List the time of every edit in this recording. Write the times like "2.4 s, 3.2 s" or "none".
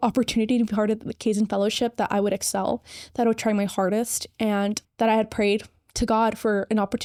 none